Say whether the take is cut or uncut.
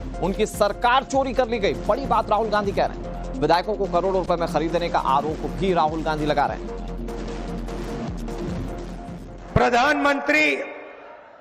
cut